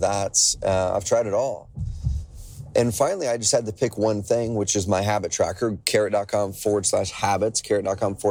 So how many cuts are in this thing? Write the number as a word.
zero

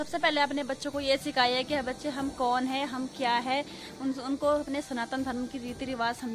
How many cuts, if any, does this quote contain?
zero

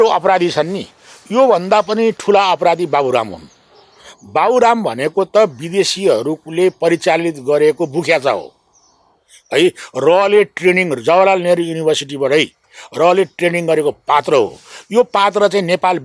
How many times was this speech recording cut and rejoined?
zero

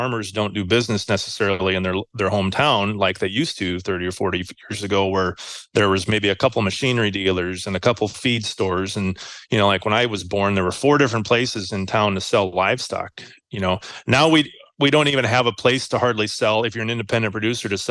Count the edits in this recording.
zero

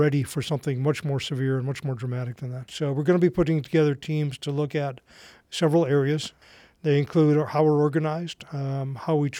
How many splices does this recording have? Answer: one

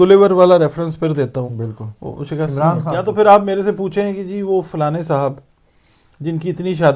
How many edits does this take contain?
one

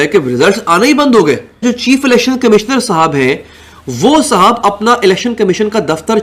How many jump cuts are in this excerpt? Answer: one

